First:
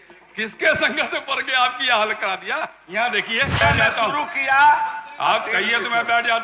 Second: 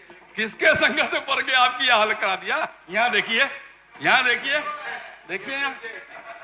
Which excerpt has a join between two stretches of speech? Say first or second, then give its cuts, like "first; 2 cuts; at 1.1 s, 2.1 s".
first; 1 cut; at 3.6 s